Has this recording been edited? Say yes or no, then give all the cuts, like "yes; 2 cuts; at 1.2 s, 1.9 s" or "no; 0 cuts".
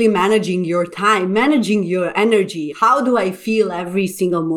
no; 0 cuts